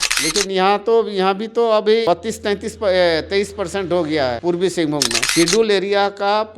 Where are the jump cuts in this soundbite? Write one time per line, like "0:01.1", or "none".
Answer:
0:05.2